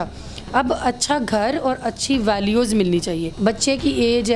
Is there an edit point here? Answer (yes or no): yes